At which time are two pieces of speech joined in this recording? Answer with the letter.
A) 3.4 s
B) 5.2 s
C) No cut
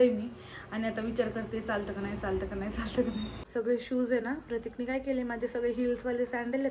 A